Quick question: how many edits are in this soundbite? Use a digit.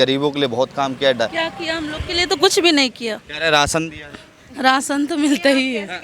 0